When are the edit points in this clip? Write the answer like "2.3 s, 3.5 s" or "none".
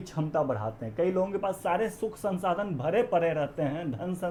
none